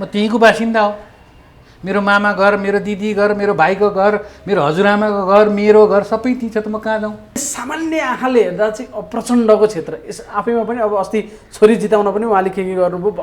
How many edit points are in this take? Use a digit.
1